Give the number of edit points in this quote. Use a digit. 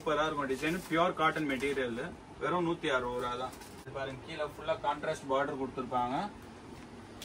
1